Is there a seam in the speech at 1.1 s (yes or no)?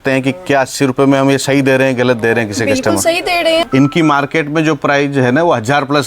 no